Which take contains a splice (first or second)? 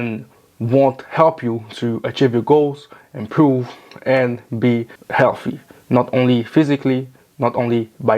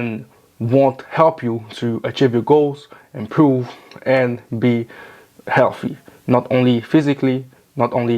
first